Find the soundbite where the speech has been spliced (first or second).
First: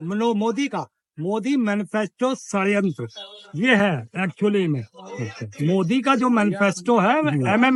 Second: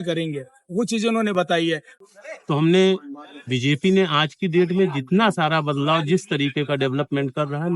second